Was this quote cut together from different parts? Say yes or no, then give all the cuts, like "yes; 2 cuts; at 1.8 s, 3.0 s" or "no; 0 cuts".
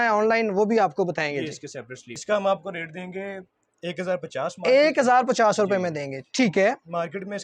yes; 1 cut; at 2.2 s